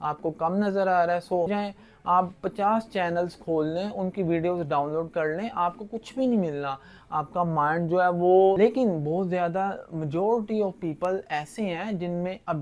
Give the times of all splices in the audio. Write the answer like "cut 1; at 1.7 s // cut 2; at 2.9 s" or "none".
cut 1; at 1.5 s // cut 2; at 8.6 s